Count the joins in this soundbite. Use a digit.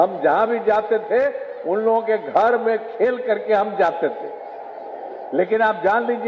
0